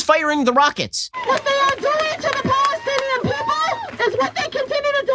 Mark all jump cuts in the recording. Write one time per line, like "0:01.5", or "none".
0:01.2
0:03.9